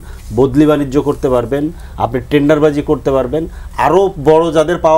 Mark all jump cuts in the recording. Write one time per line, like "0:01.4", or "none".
none